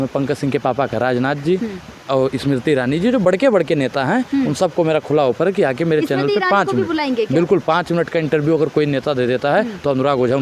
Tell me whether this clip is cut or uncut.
uncut